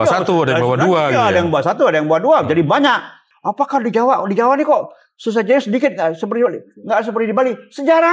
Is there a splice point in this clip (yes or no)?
yes